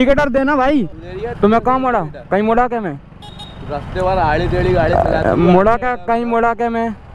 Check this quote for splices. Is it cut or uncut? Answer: cut